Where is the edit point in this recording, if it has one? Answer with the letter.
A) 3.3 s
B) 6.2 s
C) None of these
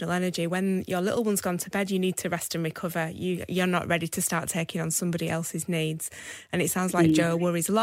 C